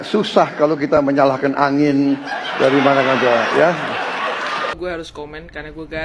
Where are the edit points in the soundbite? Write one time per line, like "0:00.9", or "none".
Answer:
0:04.8